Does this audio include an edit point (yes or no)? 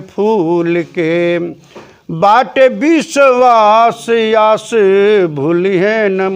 no